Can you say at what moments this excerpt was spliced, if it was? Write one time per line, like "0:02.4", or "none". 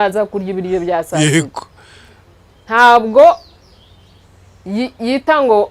none